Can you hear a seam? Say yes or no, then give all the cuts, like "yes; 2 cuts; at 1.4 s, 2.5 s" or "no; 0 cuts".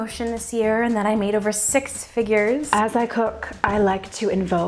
yes; 1 cut; at 2.7 s